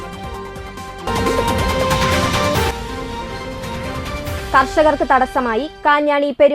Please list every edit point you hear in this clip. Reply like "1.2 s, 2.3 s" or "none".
1.1 s